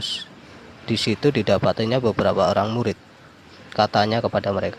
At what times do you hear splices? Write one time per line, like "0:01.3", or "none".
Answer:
none